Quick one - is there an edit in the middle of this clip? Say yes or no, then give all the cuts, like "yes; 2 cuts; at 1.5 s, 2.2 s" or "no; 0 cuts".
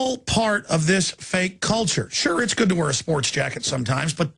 no; 0 cuts